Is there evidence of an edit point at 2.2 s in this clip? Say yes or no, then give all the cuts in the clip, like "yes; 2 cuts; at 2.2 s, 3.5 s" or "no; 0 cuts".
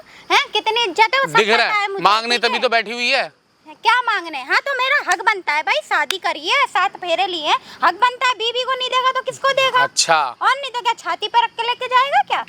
no; 0 cuts